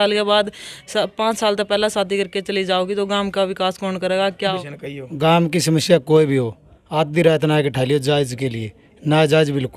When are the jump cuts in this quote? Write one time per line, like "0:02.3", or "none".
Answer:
0:04.5